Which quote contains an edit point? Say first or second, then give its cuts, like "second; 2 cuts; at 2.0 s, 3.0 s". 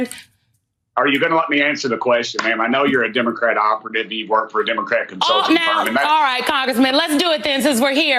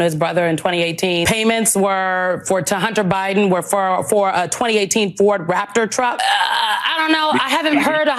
second; 2 cuts; at 1.2 s, 6.2 s